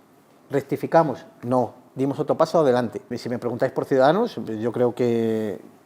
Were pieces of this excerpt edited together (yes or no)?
yes